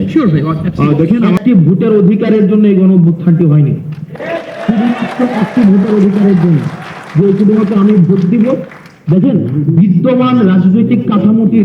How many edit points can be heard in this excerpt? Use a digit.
1